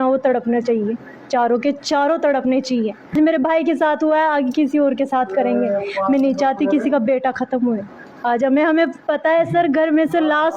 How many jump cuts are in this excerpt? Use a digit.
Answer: 1